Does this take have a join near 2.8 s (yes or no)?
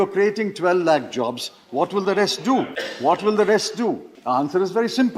yes